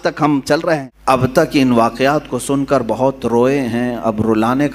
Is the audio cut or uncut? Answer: cut